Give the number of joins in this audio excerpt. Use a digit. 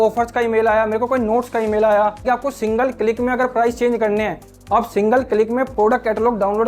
2